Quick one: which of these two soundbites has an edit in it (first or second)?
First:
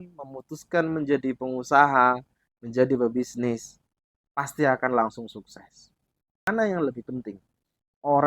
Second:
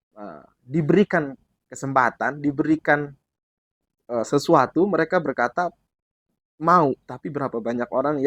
first